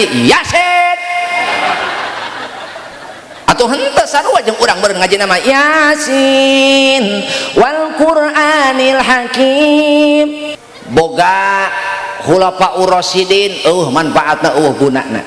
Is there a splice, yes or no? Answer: yes